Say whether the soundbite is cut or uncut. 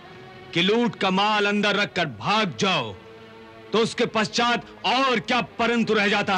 uncut